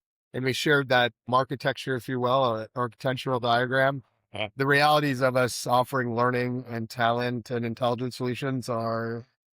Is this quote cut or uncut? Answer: cut